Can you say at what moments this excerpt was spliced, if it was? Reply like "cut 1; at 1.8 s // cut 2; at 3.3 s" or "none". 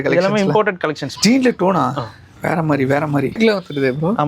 cut 1; at 1.1 s // cut 2; at 3.3 s